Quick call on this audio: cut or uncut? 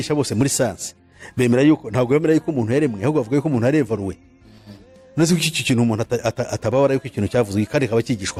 uncut